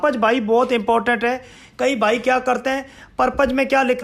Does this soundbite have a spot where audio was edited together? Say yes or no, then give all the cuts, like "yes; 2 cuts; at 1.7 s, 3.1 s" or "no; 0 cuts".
no; 0 cuts